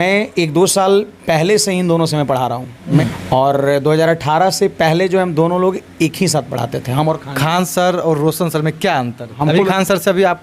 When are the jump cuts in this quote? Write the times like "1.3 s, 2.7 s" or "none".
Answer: 3.0 s, 9.3 s

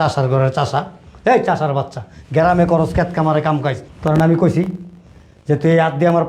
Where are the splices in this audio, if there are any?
3.9 s

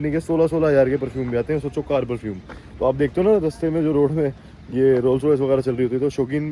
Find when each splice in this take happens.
none

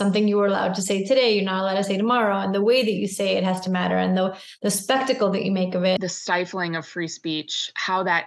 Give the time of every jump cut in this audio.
6.0 s

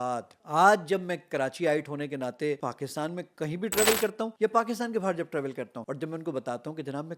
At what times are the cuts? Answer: 2.6 s, 4.3 s, 5.8 s

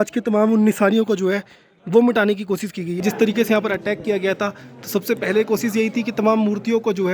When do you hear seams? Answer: 3.0 s

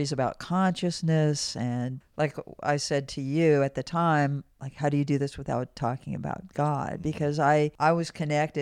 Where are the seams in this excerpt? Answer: 2.0 s, 7.7 s

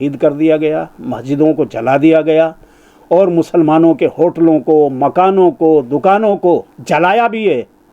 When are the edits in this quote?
6.7 s

